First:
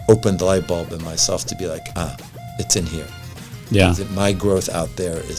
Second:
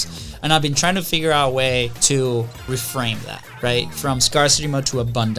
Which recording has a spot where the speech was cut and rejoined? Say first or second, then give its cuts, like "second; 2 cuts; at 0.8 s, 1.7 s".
second; 2 cuts; at 2.0 s, 2.7 s